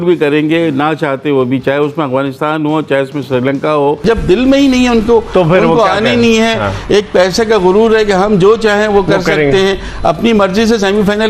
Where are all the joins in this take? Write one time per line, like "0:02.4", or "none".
0:04.0